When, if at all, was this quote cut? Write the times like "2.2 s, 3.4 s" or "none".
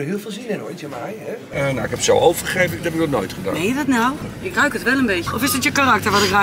1.5 s, 4.3 s, 5.3 s